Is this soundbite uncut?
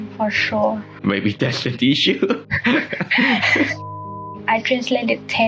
no; 3 cuts; at 0.9 s, 2.4 s, 3.8 s

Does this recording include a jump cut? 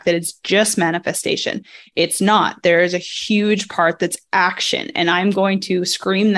no; 0 cuts

